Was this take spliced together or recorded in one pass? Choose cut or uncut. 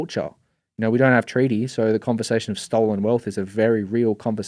uncut